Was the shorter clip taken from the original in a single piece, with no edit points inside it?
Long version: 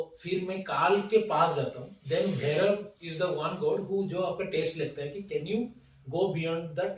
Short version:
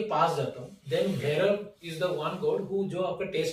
yes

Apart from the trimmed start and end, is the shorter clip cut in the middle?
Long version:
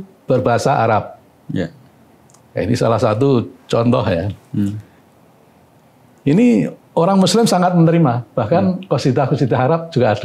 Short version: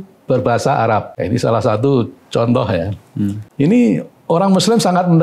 yes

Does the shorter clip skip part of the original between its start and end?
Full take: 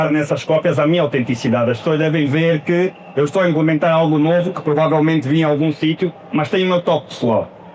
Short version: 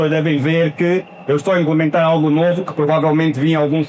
no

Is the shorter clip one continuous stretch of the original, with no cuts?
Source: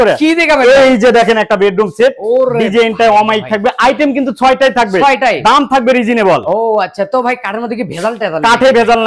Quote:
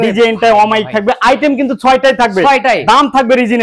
yes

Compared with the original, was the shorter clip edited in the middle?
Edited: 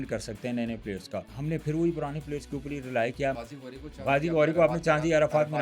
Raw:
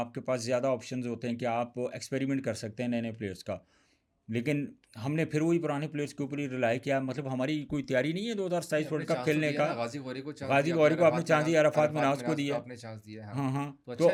yes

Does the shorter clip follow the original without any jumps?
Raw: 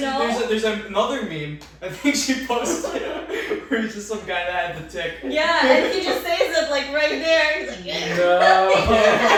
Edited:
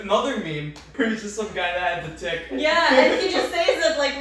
no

